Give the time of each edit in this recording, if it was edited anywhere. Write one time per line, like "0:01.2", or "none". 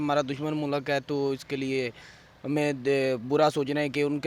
none